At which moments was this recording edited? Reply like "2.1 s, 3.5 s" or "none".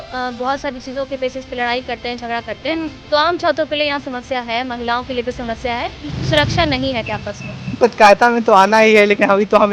7.8 s